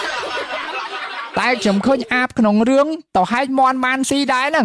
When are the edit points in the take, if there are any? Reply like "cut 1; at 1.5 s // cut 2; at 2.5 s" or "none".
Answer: cut 1; at 0.9 s